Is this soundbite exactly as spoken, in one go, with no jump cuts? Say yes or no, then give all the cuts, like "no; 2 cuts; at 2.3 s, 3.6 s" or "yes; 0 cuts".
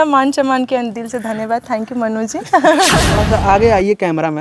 no; 1 cut; at 3.0 s